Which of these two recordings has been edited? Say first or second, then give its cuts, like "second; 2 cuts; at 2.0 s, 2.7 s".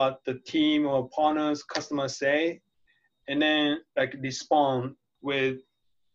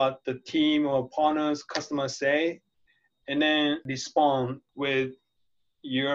second; 2 cuts; at 3.8 s, 4.6 s